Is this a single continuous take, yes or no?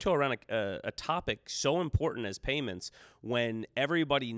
yes